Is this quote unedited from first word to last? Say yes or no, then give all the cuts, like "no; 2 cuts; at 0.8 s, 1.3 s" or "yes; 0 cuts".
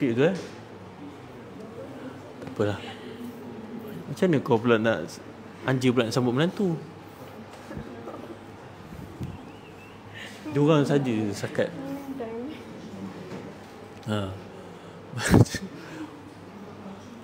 yes; 0 cuts